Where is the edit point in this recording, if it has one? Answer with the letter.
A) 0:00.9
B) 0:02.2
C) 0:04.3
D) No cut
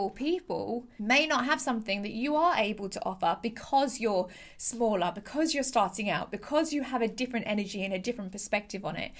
A